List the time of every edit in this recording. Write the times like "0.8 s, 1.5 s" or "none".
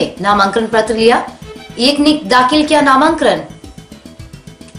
3.6 s